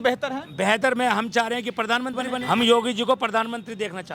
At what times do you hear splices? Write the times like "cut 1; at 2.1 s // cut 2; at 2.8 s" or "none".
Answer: cut 1; at 2.4 s